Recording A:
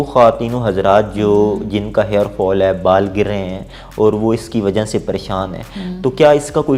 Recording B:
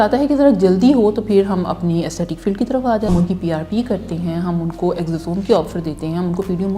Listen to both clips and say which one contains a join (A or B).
B